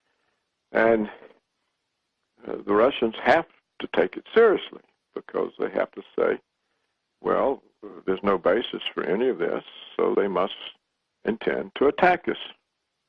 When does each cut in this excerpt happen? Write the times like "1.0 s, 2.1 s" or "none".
none